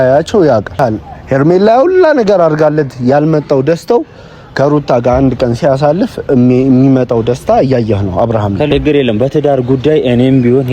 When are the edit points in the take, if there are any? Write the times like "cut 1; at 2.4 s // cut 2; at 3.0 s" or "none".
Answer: cut 1; at 0.8 s // cut 2; at 8.7 s